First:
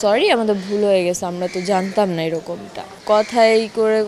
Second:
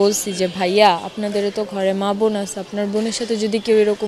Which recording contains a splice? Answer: first; 1 cut; at 3.0 s

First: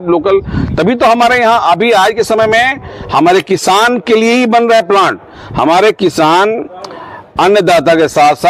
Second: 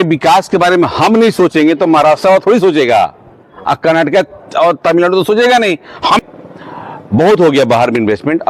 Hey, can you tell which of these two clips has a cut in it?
second; 1 cut; at 6.2 s

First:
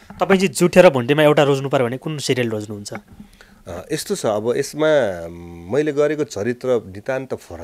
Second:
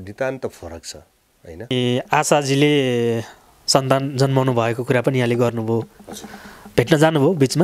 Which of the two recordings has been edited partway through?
second; 1 cut; at 1.7 s

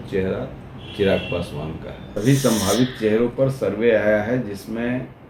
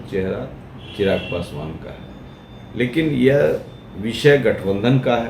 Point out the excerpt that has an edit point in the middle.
first; 1 cut; at 2.0 s

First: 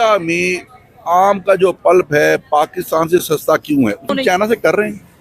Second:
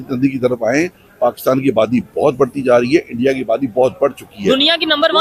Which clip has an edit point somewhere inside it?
first; 1 cut; at 4.1 s

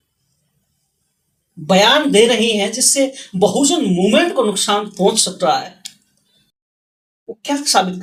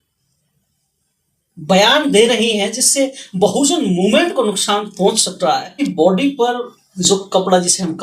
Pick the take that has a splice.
second; 1 cut; at 5.8 s

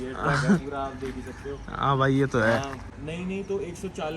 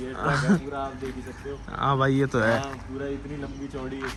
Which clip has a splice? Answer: first; 1 cut; at 2.9 s

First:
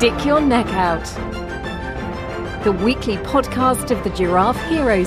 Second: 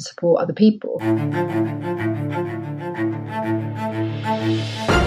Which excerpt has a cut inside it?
second; 1 cut; at 0.9 s

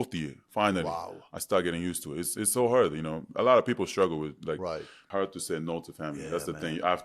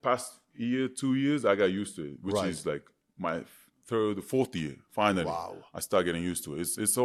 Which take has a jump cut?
first; 1 cut; at 5.0 s

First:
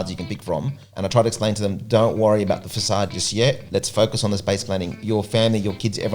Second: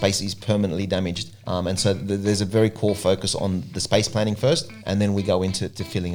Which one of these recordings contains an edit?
first; 2 cuts; at 3.5 s, 4.9 s

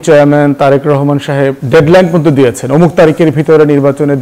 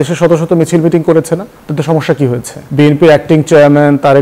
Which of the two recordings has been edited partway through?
second; 1 cut; at 2.5 s

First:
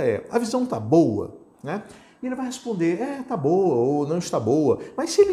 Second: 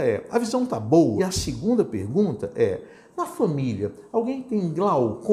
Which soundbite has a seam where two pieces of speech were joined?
second; 1 cut; at 1.2 s

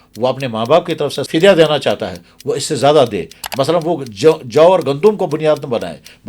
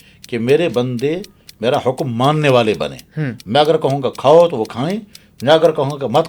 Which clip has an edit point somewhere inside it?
first; 1 cut; at 1.2 s

